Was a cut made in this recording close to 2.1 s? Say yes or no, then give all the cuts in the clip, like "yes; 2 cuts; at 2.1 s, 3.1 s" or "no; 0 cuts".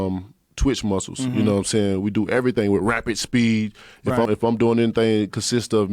no; 1 cut; at 4.3 s